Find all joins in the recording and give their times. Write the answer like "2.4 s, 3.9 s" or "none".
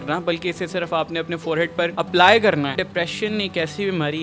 2.7 s